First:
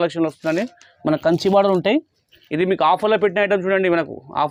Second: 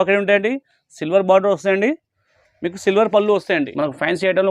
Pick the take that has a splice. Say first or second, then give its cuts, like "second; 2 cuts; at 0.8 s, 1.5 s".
second; 1 cut; at 3.6 s